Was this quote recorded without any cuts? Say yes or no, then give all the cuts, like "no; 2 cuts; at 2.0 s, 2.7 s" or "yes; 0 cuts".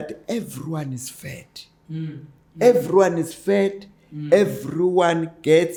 yes; 0 cuts